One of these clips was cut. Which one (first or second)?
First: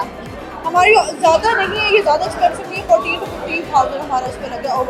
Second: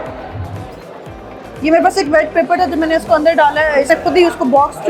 second